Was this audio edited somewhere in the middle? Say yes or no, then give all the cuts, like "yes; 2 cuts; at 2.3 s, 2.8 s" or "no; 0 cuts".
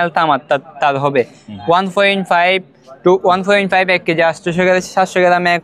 no; 0 cuts